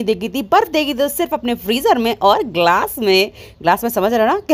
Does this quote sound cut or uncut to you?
uncut